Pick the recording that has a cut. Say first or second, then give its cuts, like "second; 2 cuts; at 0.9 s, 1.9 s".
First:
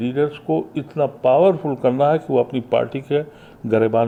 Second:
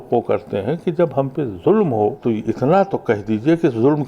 second; 1 cut; at 2.2 s